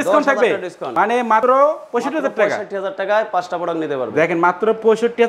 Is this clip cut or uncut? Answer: uncut